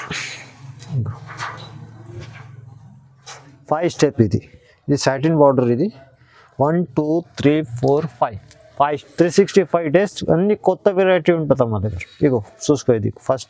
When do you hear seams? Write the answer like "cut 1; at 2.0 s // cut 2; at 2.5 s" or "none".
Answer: cut 1; at 8.8 s